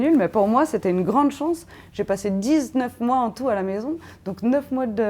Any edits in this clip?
no; 0 cuts

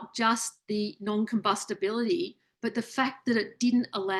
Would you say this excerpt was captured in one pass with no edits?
yes; 0 cuts

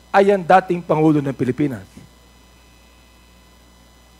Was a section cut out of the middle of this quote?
no; 0 cuts

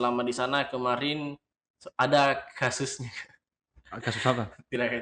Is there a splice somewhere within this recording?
no; 0 cuts

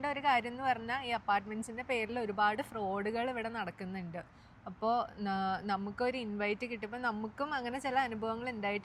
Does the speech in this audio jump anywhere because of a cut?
no; 0 cuts

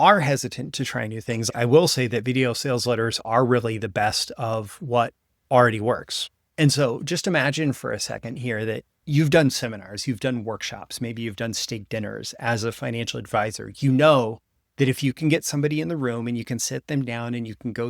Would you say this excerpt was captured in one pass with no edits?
no; 2 cuts; at 1.5 s, 8.9 s

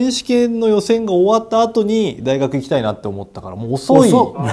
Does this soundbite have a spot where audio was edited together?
no; 0 cuts

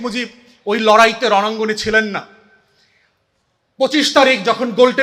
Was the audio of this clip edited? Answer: no; 0 cuts

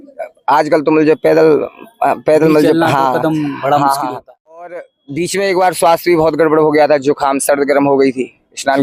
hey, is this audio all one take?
no; 1 cut; at 4.7 s

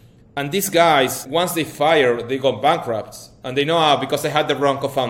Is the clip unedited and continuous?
no; 1 cut; at 1.2 s

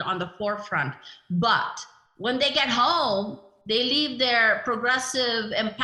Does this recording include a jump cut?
no; 0 cuts

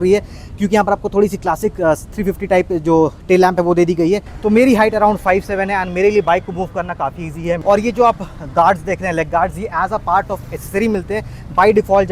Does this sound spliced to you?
yes; 2 cuts; at 4.3 s, 7.6 s

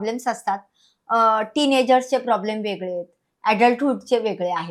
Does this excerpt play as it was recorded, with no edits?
yes; 0 cuts

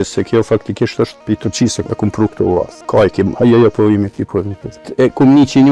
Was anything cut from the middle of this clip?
yes; 3 cuts; at 1.3 s, 2.8 s, 4.9 s

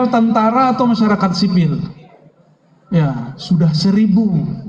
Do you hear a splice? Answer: no; 0 cuts

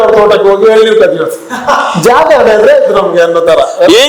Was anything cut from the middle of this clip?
no; 0 cuts

